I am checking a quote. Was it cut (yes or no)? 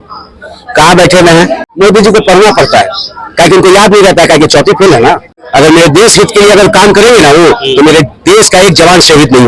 yes